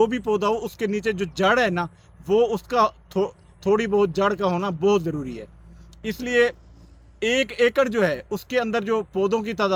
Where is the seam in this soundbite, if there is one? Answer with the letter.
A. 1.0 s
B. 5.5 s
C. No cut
C